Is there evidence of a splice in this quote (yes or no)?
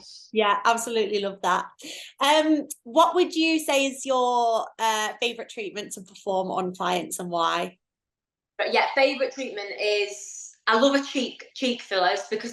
no